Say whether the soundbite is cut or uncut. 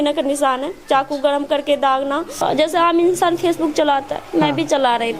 cut